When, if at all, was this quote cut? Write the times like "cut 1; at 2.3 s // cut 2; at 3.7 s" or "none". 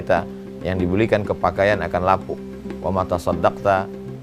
none